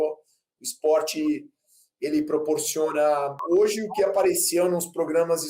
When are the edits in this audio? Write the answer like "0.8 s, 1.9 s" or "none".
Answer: 3.4 s